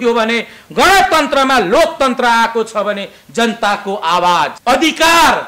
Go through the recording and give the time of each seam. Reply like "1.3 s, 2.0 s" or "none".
4.6 s